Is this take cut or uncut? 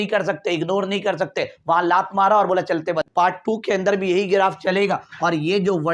cut